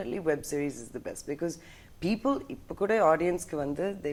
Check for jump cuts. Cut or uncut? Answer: uncut